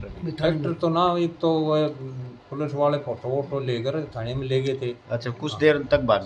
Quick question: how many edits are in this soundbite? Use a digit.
0